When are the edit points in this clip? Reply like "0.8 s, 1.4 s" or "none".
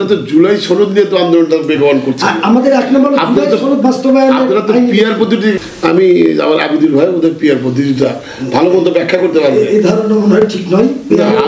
5.5 s